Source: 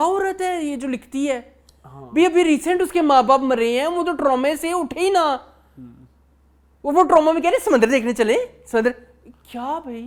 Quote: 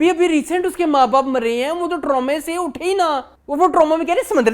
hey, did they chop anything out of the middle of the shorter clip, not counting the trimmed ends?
yes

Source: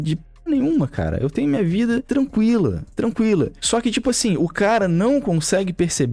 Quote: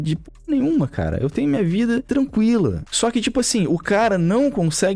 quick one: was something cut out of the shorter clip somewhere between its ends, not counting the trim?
yes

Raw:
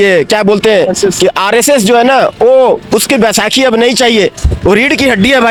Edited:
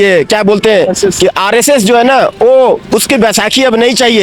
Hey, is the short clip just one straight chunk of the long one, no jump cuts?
yes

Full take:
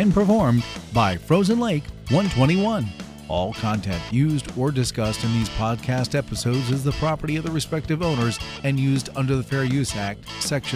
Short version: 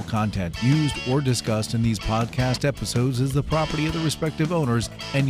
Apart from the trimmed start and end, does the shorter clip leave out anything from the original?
no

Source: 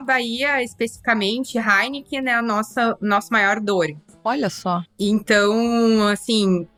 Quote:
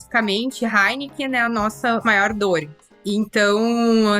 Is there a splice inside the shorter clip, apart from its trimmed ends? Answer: yes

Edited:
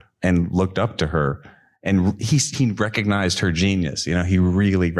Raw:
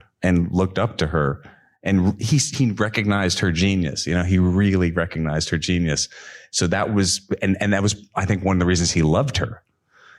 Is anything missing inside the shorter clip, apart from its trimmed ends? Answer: no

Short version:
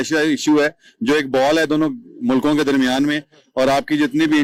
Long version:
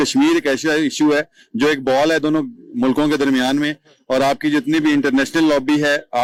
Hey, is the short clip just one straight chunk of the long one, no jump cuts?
yes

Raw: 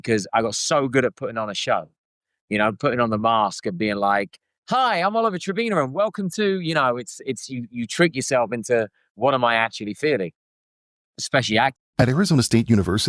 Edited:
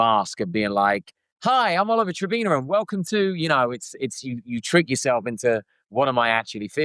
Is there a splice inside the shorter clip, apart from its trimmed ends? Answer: no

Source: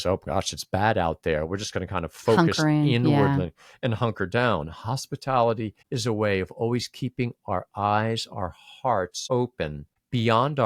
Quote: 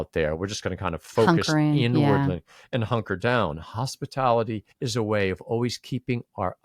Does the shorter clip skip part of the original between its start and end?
no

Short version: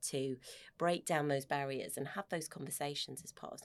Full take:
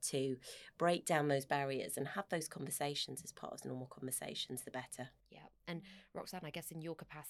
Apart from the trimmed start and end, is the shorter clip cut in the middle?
no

